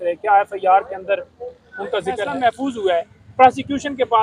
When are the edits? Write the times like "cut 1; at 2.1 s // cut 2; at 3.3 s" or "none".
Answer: cut 1; at 2.3 s